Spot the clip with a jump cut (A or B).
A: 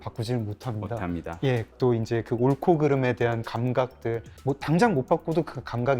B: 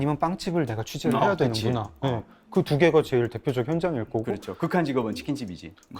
A